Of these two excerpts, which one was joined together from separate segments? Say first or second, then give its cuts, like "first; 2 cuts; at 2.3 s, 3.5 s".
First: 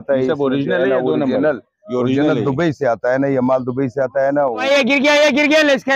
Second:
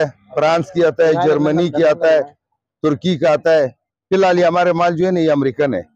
first; 1 cut; at 4.5 s